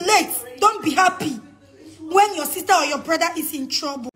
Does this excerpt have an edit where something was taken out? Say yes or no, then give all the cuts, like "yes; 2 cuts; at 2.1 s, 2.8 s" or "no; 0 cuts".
no; 0 cuts